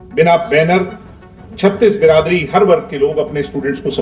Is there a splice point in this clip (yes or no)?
no